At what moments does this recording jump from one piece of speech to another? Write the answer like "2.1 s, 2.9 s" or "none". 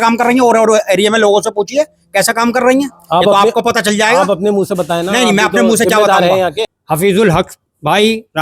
6.7 s